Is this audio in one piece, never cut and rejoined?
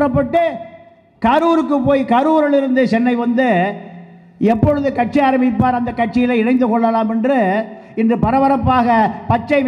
yes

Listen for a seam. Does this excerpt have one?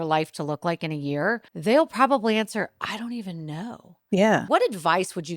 yes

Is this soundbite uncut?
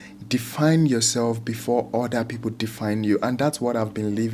yes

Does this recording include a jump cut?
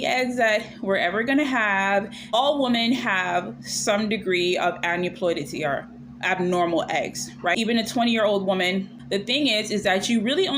yes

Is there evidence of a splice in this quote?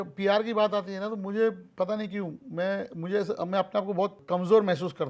yes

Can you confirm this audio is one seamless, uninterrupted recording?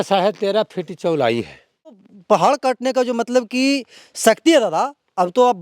no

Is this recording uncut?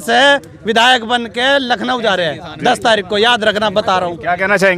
yes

